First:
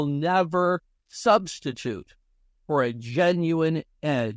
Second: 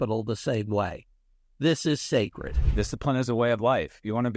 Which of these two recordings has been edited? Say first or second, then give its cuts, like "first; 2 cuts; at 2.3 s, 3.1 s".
second; 1 cut; at 2.6 s